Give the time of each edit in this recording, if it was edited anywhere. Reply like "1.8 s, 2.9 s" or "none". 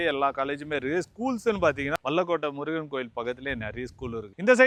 none

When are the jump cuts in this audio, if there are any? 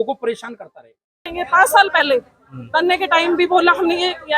1.3 s

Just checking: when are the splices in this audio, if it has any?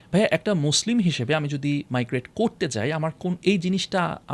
none

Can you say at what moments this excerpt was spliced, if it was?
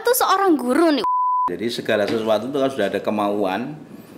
1.2 s

